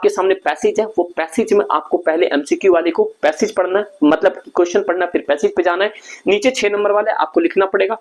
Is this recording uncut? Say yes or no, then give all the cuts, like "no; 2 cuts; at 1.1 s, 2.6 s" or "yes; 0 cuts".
yes; 0 cuts